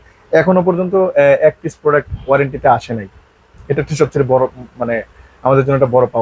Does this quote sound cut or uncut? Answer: uncut